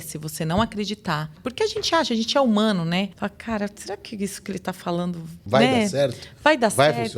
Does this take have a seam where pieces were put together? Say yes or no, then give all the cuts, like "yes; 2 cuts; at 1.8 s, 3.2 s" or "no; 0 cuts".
yes; 3 cuts; at 1.4 s, 3.1 s, 5.3 s